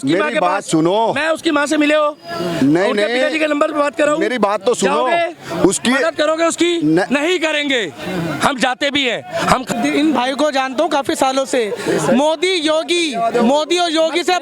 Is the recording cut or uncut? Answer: cut